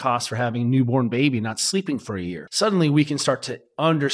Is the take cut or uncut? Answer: cut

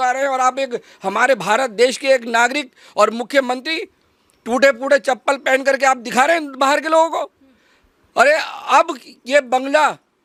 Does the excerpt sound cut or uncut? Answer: uncut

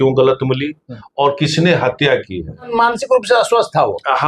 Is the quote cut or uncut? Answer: cut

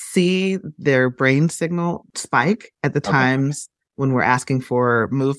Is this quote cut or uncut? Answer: cut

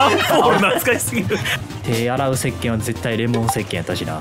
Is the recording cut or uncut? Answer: cut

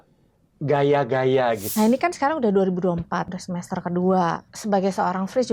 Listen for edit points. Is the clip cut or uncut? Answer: cut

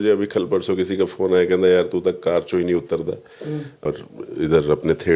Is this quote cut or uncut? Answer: cut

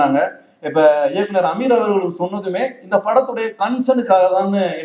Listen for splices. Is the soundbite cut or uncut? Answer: uncut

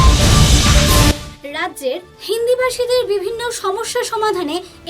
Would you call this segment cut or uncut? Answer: cut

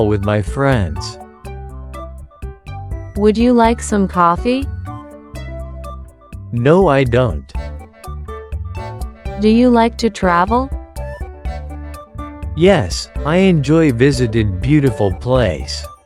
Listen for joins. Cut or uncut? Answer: uncut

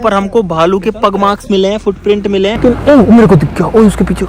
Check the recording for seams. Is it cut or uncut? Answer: cut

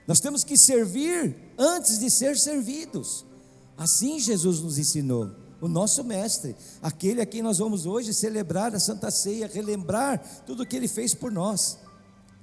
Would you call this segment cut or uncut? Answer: uncut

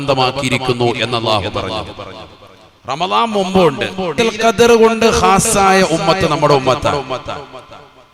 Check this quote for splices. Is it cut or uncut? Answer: cut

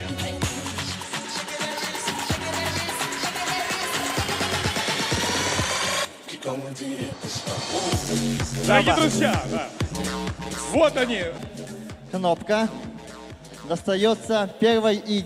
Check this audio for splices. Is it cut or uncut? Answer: cut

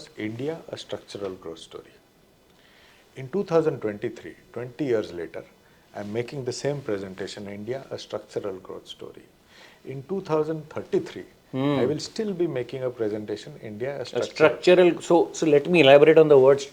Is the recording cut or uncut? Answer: uncut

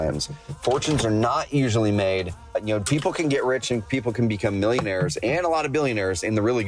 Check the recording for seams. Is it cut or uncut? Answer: cut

